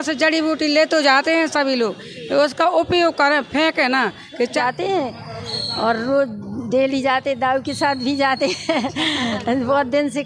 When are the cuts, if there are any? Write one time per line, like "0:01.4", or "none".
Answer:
0:04.6